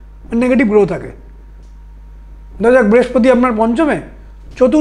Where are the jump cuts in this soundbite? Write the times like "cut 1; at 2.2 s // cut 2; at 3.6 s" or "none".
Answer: none